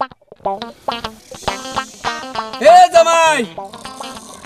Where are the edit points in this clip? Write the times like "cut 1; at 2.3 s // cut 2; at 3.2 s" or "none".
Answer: cut 1; at 1.2 s